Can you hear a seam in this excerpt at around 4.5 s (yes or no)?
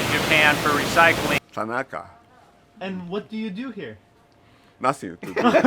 no